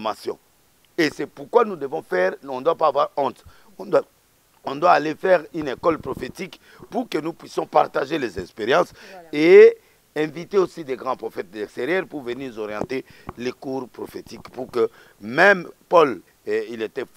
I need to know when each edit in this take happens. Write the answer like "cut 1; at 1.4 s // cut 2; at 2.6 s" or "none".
cut 1; at 16.3 s